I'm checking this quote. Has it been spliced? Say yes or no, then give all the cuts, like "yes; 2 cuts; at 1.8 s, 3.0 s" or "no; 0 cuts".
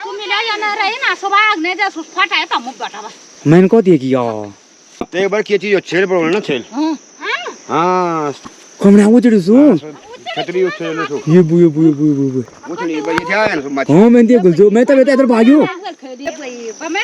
yes; 3 cuts; at 5.0 s, 8.4 s, 16.3 s